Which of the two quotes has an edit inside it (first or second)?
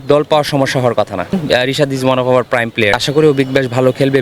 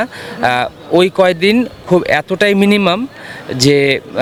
first